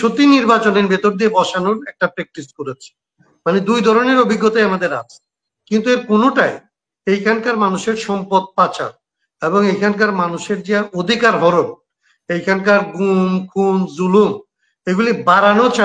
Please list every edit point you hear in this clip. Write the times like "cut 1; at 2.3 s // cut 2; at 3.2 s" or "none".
none